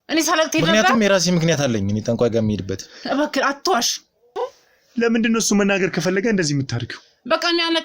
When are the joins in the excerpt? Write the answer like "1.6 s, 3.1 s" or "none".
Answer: 4.4 s